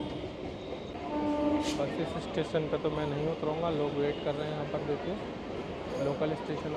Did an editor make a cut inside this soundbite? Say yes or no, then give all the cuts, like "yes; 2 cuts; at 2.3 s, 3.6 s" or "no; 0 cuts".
yes; 1 cut; at 0.9 s